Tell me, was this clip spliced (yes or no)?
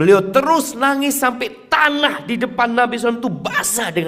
no